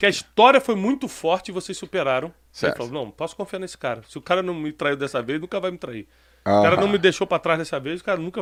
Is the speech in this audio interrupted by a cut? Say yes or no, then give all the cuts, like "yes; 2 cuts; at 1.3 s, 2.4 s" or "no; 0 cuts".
no; 0 cuts